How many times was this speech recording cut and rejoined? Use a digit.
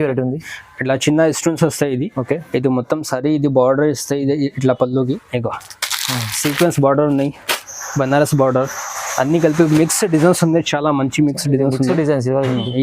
1